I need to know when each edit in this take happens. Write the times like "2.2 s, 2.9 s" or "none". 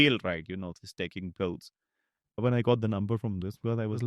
2.4 s